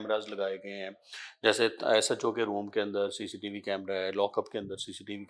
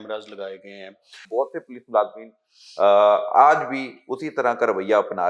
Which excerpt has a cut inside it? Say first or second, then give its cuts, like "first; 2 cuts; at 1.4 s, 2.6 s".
second; 1 cut; at 1.2 s